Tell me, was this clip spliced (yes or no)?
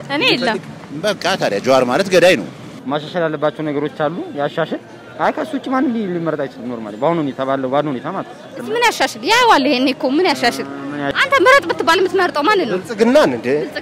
yes